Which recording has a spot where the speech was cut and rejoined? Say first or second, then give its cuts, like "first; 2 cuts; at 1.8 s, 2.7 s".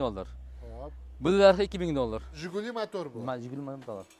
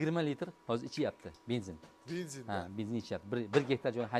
first; 1 cut; at 2.4 s